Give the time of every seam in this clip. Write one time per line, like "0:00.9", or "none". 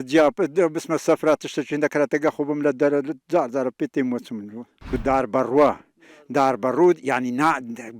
0:04.9